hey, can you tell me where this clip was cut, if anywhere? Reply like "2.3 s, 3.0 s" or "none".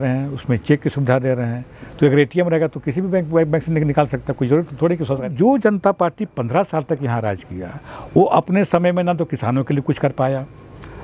5.3 s